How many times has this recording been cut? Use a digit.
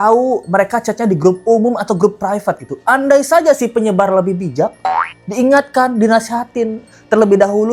0